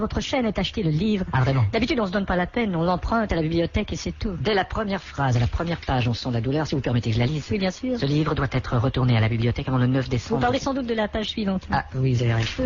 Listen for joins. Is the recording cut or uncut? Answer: cut